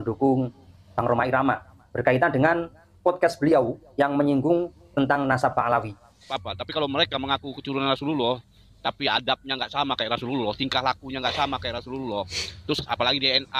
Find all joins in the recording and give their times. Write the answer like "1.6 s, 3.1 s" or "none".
6.3 s